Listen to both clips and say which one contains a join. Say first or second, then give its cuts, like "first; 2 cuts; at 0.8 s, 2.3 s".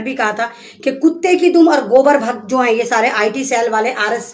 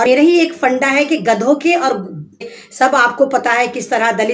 second; 1 cut; at 2.4 s